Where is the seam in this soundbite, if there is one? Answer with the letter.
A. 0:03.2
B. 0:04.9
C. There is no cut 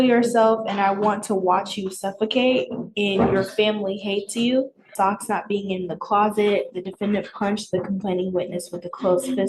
B